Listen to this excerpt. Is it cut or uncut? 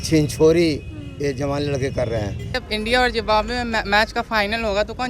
cut